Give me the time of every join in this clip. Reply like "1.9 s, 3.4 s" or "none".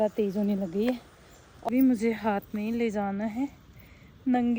1.7 s